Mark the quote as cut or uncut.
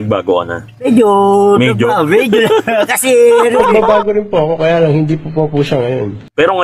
uncut